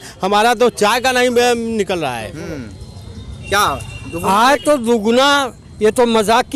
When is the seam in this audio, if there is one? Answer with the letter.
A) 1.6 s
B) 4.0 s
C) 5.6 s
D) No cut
D